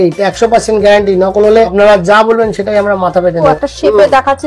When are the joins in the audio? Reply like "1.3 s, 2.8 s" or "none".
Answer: 1.7 s, 3.5 s